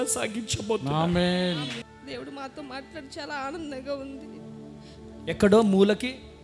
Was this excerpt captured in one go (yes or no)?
no